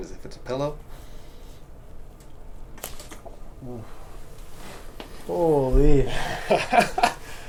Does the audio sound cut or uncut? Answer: uncut